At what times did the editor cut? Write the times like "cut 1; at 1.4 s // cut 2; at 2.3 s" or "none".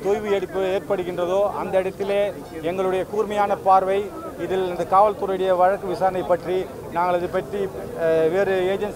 none